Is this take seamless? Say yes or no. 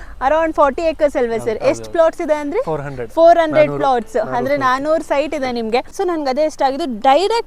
no